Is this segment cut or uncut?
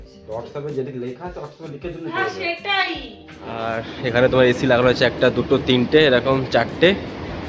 cut